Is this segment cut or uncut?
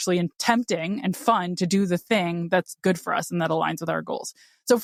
uncut